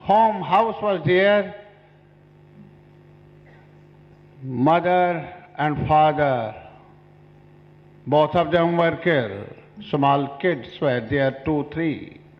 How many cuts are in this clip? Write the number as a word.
zero